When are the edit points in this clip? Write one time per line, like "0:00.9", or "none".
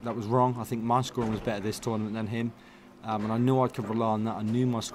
none